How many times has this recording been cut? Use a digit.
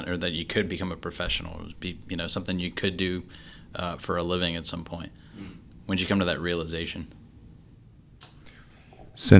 0